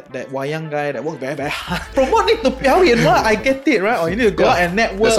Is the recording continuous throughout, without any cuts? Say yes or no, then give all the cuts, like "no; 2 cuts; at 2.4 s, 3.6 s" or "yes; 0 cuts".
no; 1 cut; at 1.8 s